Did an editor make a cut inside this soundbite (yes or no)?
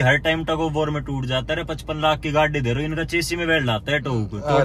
no